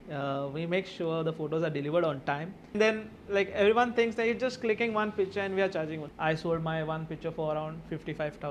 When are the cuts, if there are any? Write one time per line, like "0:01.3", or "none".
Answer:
0:02.7
0:06.0